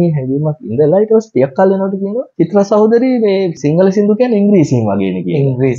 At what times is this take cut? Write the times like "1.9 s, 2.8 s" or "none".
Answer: 2.2 s, 3.6 s